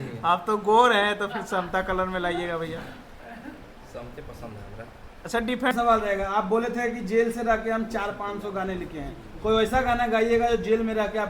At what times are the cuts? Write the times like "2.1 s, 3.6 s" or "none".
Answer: 5.7 s